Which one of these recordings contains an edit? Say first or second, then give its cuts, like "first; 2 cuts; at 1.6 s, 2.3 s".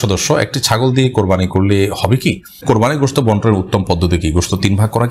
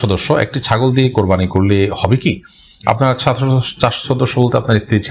first; 1 cut; at 2.6 s